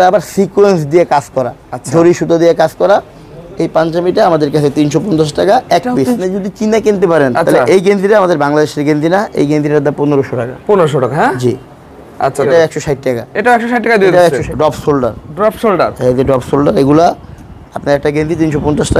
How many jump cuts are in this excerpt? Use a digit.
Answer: 3